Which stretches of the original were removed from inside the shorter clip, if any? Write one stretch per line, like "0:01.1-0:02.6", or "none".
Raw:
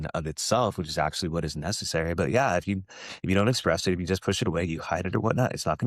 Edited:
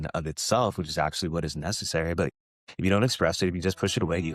0:02.3-0:02.8